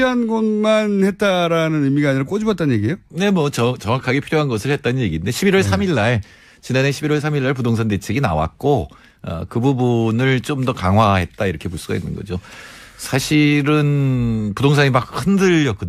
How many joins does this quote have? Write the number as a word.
zero